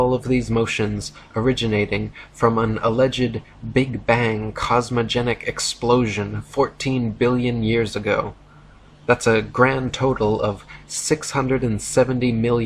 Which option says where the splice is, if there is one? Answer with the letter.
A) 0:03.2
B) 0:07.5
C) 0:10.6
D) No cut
B